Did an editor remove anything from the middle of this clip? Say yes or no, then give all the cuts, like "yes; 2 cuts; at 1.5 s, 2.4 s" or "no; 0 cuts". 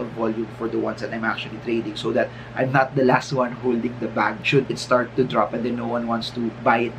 no; 0 cuts